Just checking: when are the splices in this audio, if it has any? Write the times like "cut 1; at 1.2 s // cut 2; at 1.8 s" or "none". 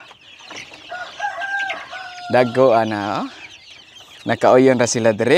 none

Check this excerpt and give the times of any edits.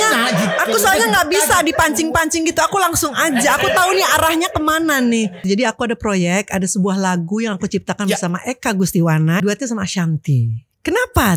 cut 1; at 5.4 s // cut 2; at 9.4 s

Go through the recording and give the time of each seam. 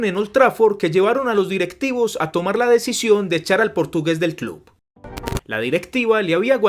cut 1; at 5.1 s

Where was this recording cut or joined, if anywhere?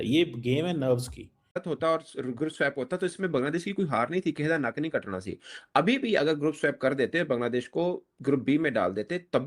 cut 1; at 1.6 s

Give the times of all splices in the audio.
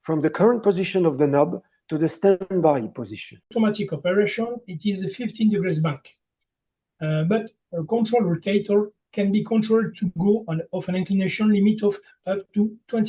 cut 1; at 3.5 s

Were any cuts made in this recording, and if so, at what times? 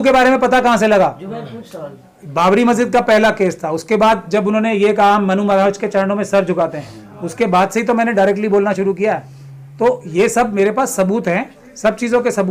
none

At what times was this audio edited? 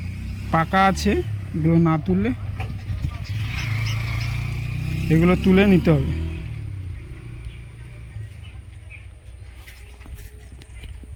none

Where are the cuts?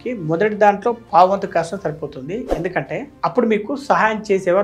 none

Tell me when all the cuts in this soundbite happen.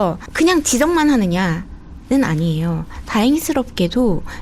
none

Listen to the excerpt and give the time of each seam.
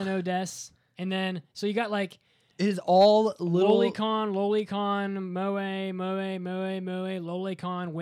none

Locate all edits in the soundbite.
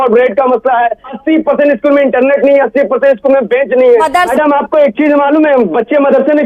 cut 1; at 1.1 s // cut 2; at 4.1 s

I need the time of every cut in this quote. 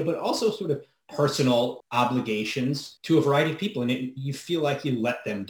cut 1; at 1.8 s // cut 2; at 2.9 s

